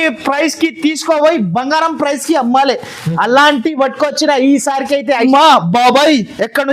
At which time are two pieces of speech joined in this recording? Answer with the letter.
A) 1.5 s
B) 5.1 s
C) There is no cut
B